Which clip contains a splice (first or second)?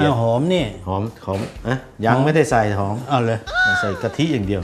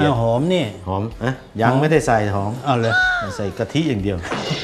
second